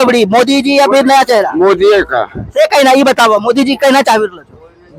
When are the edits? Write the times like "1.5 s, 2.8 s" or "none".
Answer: none